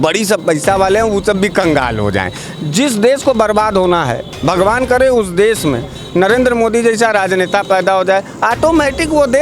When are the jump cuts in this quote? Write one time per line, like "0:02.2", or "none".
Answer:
none